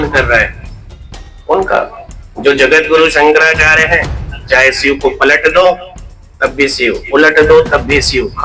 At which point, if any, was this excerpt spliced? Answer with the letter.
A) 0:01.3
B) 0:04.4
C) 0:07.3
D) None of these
B